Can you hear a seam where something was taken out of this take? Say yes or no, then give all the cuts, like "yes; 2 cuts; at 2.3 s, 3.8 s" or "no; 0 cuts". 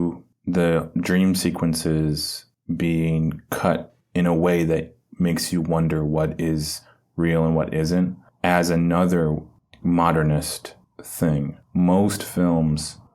yes; 1 cut; at 11.6 s